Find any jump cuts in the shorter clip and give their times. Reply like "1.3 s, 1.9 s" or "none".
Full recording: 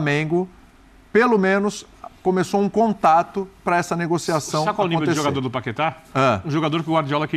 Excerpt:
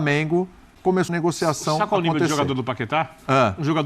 1.0 s